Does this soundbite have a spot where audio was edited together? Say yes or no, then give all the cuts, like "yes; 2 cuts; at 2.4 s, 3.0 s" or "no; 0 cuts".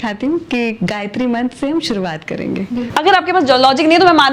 yes; 1 cut; at 2.9 s